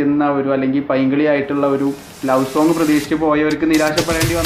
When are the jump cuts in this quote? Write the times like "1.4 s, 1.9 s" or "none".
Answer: none